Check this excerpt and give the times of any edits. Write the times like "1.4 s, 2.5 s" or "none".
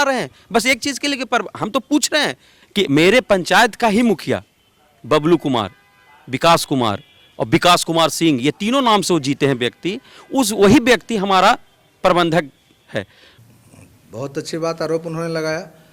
2.5 s, 13.6 s